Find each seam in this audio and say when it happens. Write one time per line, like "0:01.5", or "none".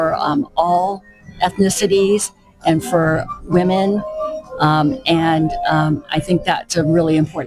none

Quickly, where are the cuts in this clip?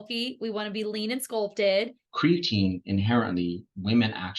0:02.0

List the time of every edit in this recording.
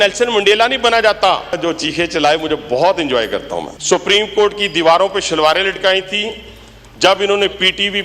0:01.6
0:03.6

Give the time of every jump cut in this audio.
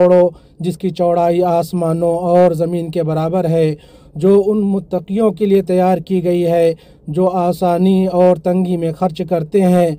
none

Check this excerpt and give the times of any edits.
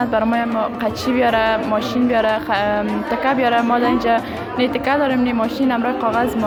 none

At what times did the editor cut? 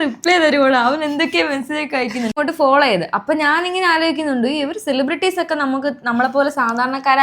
0:02.3

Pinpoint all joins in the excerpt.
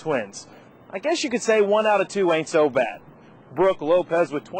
none

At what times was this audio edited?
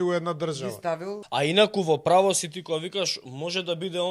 0:01.2

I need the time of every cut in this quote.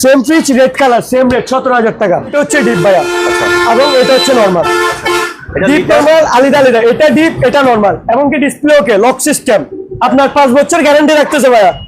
0:02.3

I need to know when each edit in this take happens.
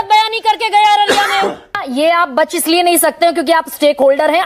0:01.8

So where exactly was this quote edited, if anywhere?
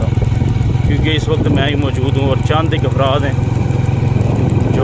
none

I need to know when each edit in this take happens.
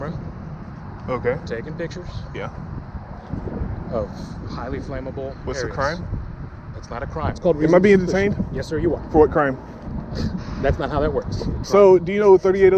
0:07.4
0:11.6

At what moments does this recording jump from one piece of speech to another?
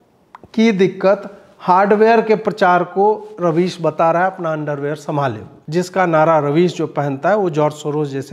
0:05.5

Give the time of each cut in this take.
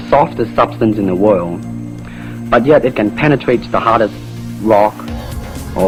none

